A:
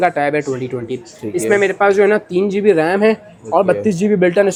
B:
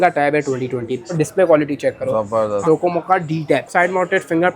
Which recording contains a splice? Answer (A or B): B